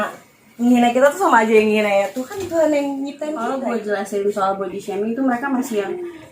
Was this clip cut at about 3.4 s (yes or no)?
yes